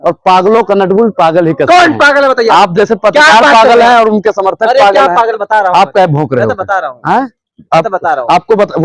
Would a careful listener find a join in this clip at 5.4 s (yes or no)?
yes